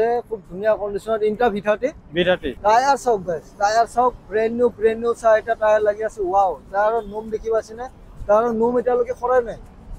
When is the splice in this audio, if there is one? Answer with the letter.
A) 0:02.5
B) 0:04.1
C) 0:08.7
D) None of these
A